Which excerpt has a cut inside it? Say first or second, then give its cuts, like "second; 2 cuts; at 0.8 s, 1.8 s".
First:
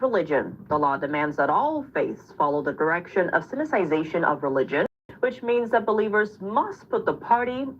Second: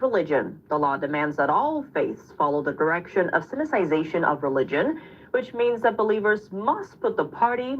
first; 1 cut; at 4.9 s